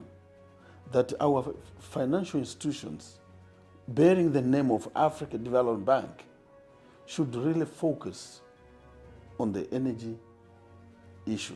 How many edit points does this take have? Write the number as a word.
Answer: zero